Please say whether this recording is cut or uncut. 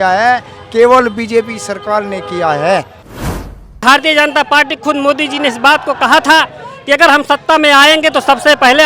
cut